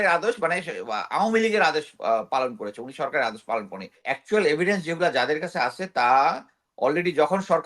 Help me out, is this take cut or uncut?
cut